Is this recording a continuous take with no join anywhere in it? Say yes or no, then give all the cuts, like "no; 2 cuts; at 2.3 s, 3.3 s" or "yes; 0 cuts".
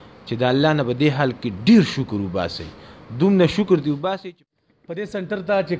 no; 1 cut; at 4.1 s